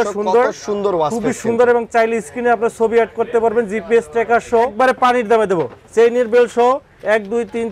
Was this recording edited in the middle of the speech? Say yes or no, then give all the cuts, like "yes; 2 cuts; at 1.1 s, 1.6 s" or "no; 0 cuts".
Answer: yes; 1 cut; at 4.7 s